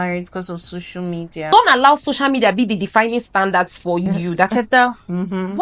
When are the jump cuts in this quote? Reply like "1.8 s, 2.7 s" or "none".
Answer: 1.5 s, 4.5 s